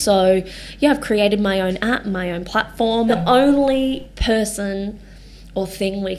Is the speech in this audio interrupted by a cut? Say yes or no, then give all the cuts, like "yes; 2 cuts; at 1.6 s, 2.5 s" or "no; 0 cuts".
yes; 1 cut; at 3.1 s